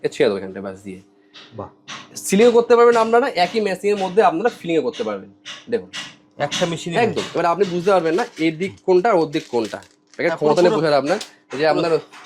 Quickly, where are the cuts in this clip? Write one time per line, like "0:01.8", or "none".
none

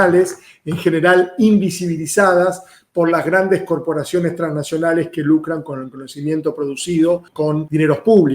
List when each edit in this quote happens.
0:07.4

